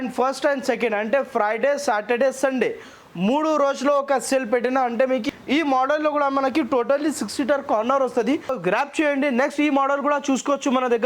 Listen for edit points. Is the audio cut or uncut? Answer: cut